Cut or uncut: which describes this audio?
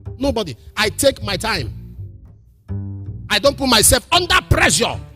cut